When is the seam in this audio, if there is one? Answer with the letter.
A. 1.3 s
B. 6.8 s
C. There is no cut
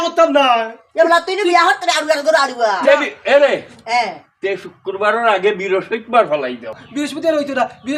B